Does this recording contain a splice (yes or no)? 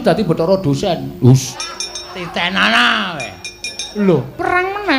yes